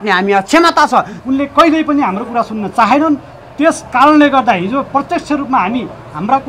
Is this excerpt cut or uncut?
cut